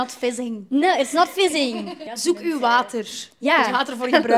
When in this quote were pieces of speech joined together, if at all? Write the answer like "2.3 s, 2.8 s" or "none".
2.1 s